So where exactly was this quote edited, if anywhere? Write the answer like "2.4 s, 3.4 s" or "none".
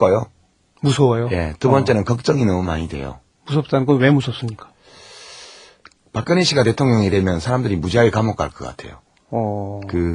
8.6 s